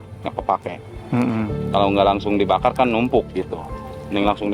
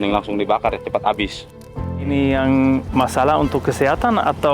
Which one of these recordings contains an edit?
second; 2 cuts; at 1.9 s, 2.9 s

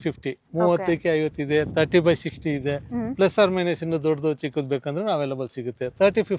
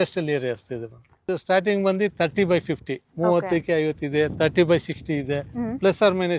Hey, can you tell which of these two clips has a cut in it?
second; 1 cut; at 1.2 s

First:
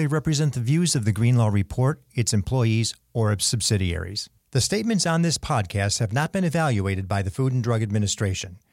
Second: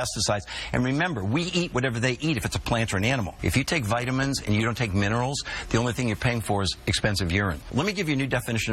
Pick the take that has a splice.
second; 2 cuts; at 3.3 s, 7.6 s

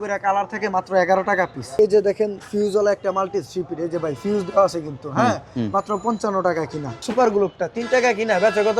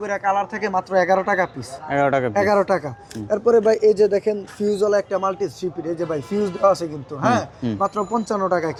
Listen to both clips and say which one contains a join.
first; 2 cuts; at 1.8 s, 6.9 s

